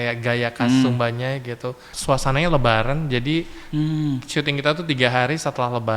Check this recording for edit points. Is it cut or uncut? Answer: cut